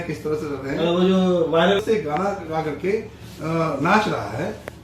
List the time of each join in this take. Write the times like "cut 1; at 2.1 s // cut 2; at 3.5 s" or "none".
cut 1; at 1.8 s